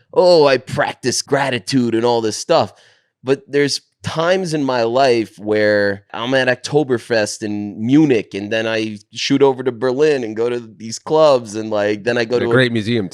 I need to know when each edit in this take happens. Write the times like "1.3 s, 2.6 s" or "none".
1.2 s, 6.2 s